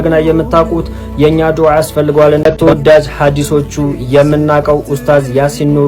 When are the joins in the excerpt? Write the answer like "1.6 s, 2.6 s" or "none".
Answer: 2.5 s